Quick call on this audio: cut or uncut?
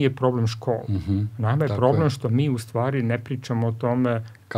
uncut